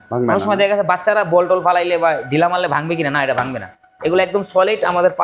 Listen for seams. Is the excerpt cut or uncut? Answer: uncut